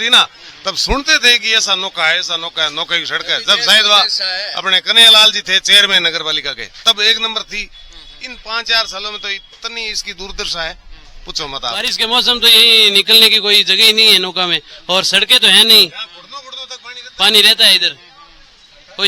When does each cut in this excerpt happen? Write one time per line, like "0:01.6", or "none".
0:11.9

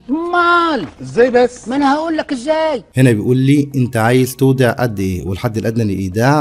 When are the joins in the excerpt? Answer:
0:02.9

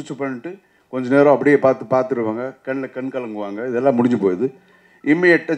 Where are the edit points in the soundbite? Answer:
none

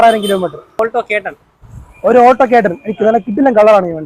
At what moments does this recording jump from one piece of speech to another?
0:01.1

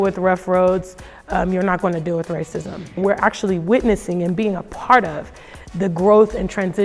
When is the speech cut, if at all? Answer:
0:03.0

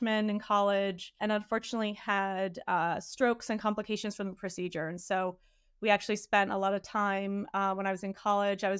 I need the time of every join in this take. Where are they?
0:01.1

